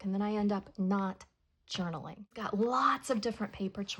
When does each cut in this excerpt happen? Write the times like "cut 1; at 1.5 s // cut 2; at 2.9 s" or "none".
cut 1; at 2.4 s